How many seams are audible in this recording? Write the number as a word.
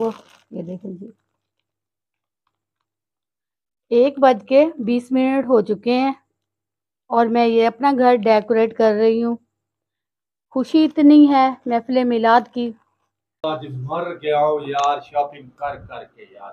one